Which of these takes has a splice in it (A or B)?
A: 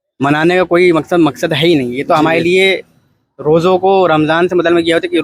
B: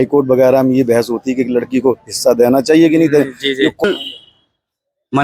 B